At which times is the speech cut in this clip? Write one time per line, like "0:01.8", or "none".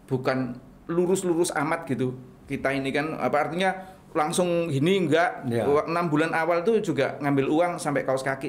none